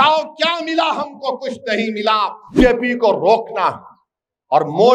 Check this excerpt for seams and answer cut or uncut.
cut